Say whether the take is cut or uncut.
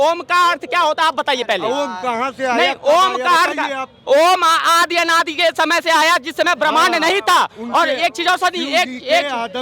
uncut